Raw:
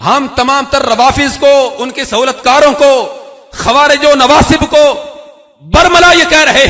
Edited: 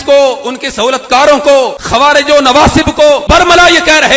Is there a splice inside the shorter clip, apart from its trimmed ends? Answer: yes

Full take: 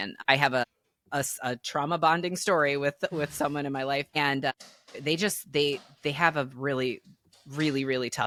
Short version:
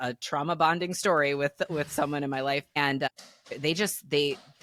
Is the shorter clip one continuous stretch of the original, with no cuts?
yes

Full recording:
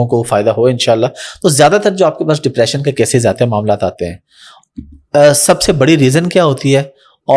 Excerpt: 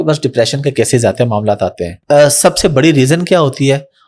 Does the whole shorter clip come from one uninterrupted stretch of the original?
no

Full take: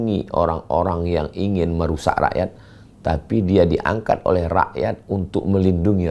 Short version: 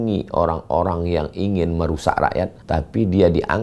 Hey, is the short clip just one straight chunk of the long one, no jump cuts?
no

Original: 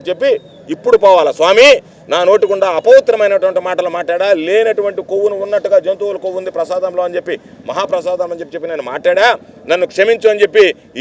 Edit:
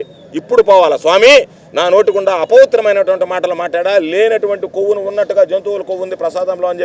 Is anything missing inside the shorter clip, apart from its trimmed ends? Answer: no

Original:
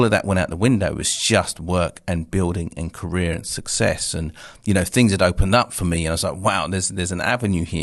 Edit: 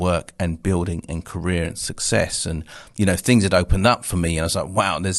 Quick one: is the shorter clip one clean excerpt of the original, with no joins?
yes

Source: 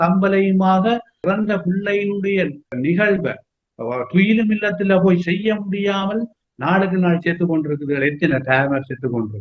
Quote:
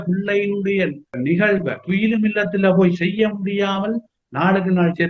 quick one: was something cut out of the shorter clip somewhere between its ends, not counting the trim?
yes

